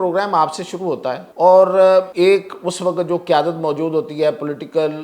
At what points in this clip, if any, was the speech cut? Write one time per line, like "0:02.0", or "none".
0:01.3
0:02.1